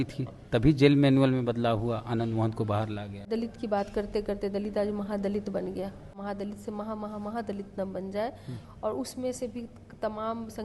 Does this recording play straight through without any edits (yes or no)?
no